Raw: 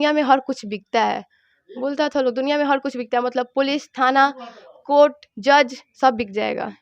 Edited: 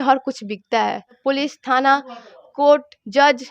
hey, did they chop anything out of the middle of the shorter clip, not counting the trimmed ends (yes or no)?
yes